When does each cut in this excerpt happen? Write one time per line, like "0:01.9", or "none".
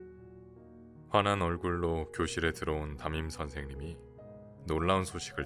0:01.1